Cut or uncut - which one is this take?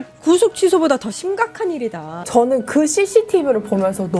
cut